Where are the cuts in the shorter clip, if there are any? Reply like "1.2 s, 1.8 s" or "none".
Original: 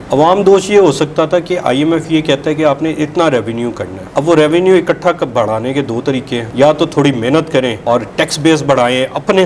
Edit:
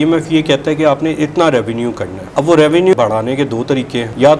2.9 s

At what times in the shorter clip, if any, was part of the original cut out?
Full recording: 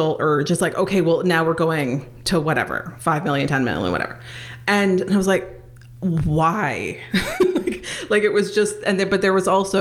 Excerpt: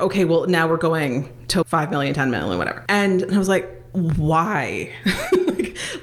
1.7 s, 2.8 s, 3.8 s

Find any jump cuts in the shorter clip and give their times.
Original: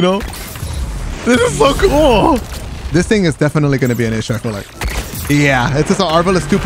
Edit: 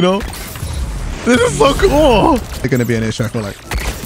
2.7 s

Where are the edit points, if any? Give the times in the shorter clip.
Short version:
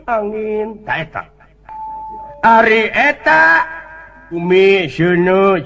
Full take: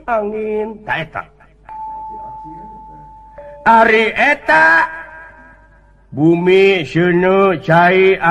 2.3 s, 4.4 s

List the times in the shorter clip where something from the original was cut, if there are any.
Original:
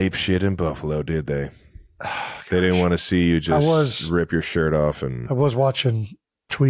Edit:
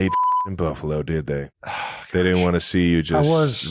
1.6 s

